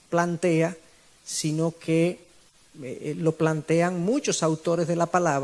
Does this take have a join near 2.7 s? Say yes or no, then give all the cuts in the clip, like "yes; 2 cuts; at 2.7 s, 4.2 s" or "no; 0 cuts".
no; 1 cut; at 4.3 s